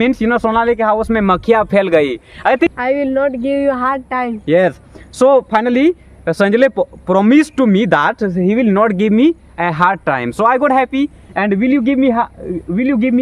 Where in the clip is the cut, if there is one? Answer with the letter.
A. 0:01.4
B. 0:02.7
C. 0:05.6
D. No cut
B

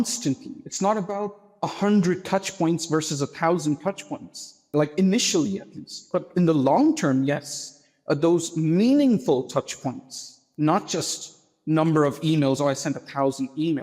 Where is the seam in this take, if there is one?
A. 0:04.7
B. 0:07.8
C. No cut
A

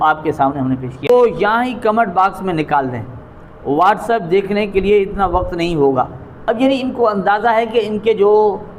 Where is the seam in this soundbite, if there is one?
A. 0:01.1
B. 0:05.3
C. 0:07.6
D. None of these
A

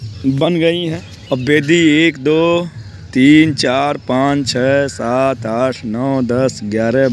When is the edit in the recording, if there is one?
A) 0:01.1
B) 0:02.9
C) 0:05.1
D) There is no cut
A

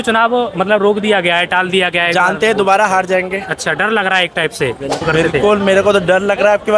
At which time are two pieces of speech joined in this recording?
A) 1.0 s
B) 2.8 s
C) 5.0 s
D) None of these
C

